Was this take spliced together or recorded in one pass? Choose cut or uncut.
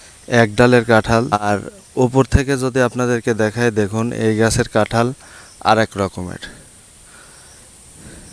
cut